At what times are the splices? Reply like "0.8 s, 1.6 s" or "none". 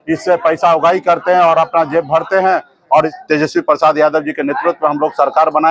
3.1 s